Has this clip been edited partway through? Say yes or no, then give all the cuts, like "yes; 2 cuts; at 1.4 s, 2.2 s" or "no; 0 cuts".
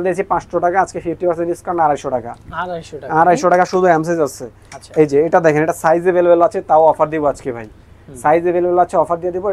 no; 0 cuts